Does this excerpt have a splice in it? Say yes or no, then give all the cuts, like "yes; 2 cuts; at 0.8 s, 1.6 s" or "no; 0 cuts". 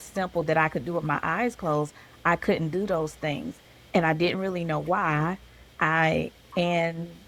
no; 0 cuts